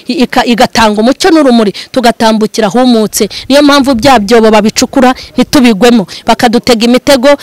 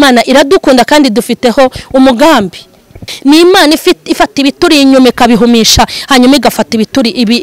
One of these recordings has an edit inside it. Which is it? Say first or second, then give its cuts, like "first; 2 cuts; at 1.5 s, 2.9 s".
second; 1 cut; at 3.0 s